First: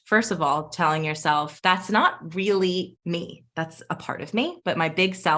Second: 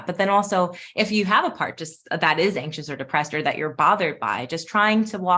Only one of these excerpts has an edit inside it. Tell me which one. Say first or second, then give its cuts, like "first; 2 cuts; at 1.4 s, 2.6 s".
first; 3 cuts; at 1.5 s, 2.9 s, 4.6 s